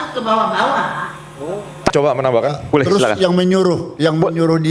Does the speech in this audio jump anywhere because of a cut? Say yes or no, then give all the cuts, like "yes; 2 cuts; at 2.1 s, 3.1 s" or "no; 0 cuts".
yes; 1 cut; at 1.9 s